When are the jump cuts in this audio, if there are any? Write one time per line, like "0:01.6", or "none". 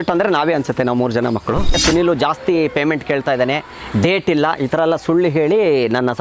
0:01.8

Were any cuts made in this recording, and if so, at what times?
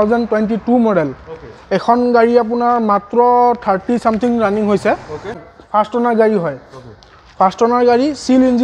0:05.5

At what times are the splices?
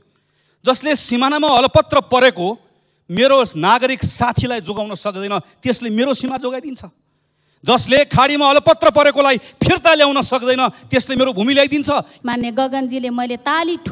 0:12.1

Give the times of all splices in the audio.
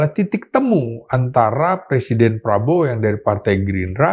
none

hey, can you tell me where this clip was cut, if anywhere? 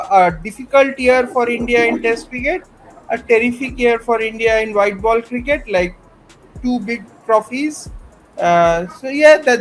none

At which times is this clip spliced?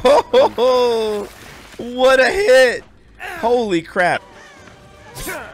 0:04.2

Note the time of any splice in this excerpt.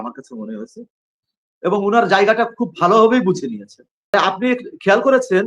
0:04.1

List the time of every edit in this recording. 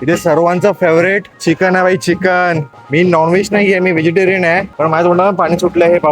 0:01.3
0:02.7
0:04.7

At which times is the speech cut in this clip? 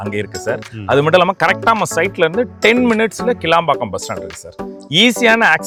none

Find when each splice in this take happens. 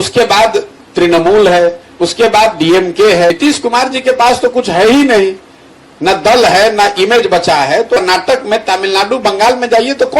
0:03.3
0:08.0

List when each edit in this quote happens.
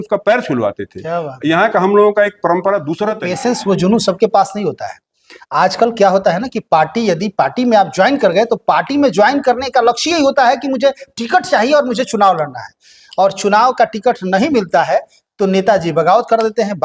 0:03.3

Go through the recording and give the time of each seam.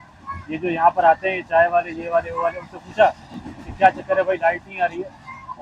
none

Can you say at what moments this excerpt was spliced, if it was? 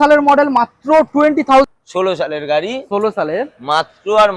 0:01.7

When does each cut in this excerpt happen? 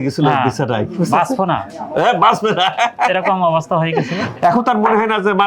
0:04.3

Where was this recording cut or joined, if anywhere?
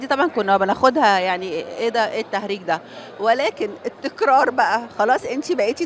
none

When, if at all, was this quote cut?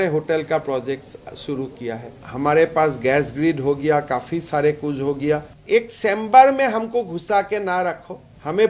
0:02.2
0:05.5

